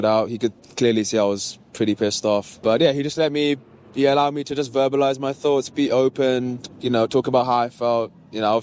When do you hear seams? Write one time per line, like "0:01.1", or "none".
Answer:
0:02.5